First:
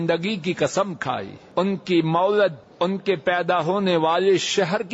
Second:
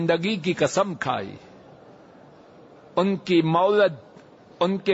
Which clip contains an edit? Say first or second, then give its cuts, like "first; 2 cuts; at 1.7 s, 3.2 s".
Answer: first; 2 cuts; at 1.4 s, 2.6 s